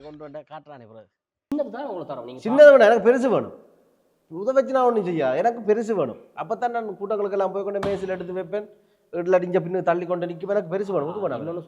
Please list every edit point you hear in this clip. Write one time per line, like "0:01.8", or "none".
0:01.5